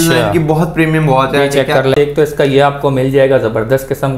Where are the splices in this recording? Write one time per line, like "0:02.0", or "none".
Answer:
0:01.9